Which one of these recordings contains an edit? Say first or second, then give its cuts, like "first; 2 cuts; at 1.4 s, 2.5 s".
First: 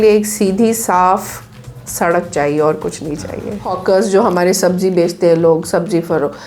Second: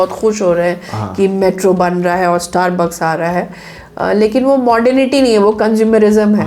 first; 1 cut; at 3.7 s